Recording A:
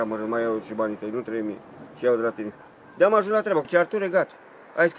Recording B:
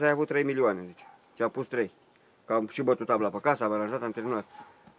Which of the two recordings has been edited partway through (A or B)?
A